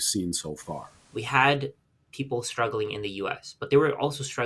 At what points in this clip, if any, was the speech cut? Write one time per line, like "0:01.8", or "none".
0:01.0